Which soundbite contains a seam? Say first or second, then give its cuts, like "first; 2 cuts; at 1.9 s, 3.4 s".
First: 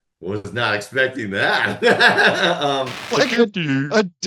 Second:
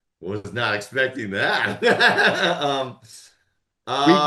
first; 1 cut; at 3.0 s